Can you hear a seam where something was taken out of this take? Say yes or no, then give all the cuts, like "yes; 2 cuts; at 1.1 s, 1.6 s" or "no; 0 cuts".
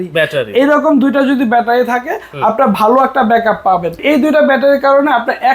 yes; 1 cut; at 4.0 s